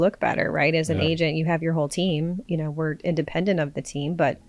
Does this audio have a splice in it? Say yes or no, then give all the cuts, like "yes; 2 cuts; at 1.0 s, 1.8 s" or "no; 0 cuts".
yes; 1 cut; at 2.4 s